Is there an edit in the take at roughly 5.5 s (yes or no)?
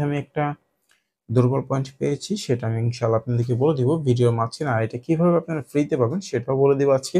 no